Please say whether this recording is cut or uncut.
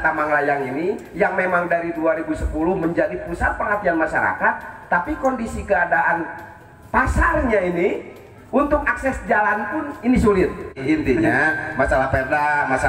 cut